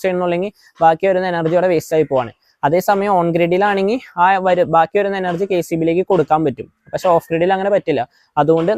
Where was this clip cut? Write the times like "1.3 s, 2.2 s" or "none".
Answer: none